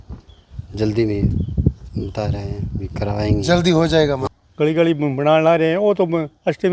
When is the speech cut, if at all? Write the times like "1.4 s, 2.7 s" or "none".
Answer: 4.2 s